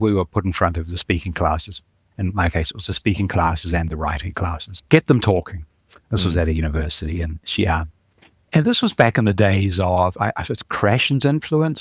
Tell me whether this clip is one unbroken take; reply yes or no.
yes